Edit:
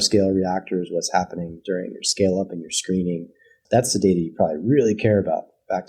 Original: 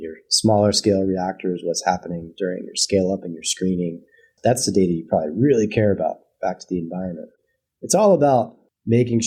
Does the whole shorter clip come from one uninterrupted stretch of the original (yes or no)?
yes